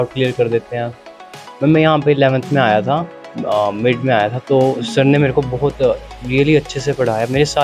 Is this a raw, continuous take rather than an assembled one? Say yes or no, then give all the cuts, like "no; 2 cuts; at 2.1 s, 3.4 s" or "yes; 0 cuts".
yes; 0 cuts